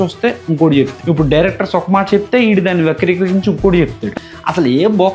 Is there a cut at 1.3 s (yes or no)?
no